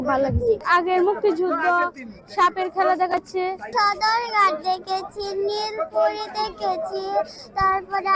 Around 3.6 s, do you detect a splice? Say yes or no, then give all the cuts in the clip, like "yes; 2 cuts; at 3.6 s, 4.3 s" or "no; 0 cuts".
no; 0 cuts